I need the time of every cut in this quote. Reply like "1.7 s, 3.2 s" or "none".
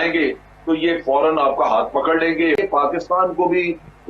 2.6 s